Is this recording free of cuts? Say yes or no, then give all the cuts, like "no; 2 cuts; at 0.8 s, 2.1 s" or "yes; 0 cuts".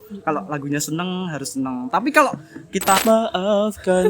no; 1 cut; at 3.0 s